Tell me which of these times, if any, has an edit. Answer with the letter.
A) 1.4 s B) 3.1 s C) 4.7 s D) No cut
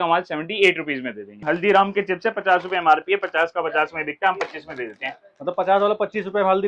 A